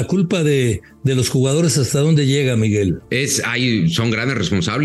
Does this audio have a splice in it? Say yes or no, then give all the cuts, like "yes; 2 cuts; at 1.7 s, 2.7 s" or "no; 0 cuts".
yes; 1 cut; at 3.0 s